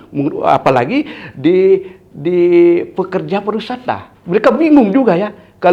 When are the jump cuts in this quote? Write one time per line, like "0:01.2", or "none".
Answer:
0:04.1